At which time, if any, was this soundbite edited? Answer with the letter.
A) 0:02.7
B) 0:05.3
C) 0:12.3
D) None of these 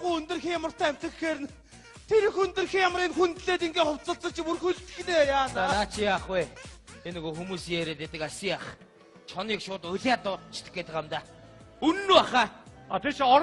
C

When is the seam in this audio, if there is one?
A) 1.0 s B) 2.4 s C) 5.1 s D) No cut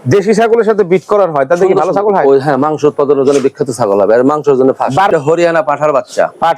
C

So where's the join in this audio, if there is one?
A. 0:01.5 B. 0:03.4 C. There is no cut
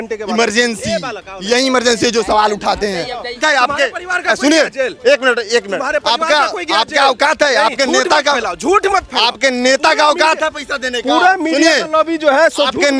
B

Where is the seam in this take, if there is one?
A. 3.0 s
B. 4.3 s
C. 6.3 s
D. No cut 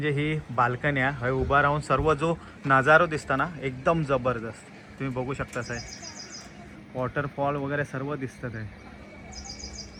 D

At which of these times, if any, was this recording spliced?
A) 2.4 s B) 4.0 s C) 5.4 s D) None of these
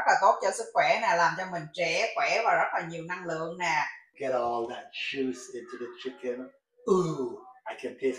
B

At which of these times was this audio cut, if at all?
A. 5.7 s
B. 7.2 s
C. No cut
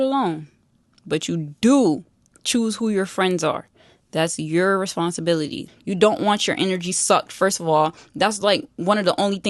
A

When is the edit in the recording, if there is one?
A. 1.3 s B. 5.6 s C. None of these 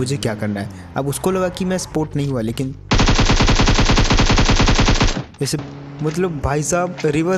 B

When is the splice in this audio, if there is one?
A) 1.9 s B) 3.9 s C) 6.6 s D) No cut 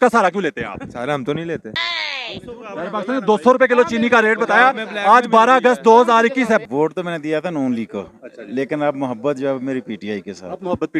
C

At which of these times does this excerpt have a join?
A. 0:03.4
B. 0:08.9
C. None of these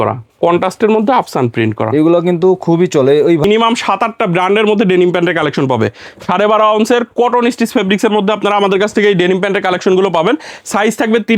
A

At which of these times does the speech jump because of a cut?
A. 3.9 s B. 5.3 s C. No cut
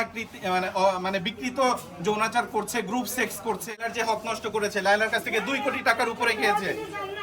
A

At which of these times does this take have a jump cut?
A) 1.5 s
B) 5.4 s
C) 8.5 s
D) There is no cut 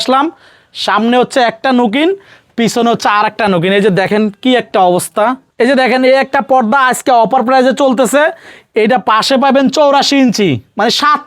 B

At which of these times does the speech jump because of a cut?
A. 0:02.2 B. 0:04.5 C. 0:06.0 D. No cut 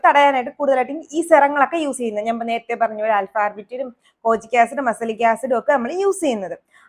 D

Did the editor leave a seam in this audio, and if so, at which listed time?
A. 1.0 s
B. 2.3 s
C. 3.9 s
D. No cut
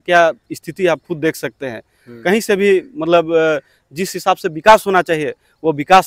D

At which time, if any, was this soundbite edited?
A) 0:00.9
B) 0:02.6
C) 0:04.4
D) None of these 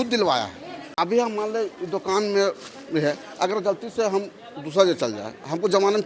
A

